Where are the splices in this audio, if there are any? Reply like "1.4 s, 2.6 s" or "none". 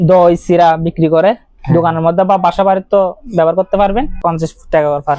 4.1 s